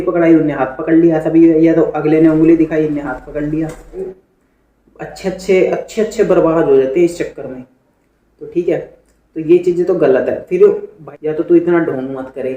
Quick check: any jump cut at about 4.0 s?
yes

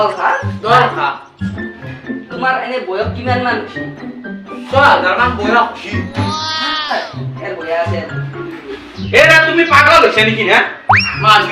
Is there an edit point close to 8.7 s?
yes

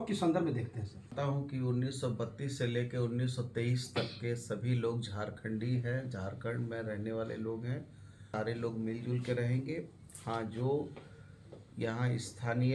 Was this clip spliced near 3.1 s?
no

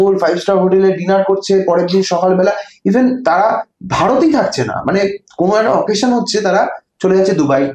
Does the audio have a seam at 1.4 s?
no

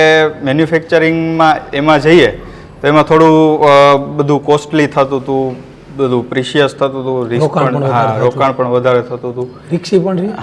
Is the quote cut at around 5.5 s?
no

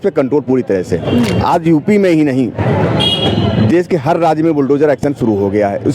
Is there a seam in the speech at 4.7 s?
no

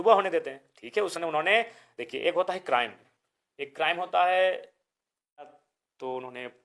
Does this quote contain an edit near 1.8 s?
no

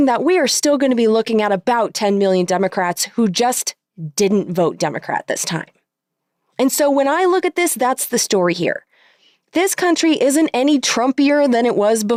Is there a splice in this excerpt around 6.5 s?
no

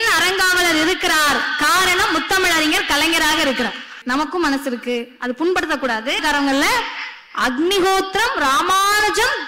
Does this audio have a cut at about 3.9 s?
yes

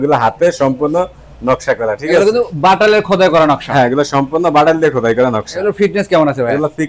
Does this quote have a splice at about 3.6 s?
no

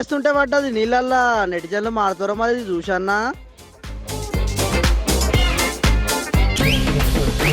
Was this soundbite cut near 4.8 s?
no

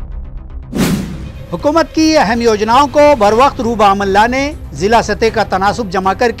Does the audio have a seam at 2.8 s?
no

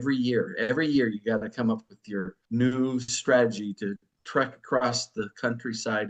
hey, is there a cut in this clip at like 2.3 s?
yes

